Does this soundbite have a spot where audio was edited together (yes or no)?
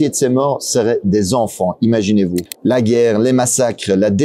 yes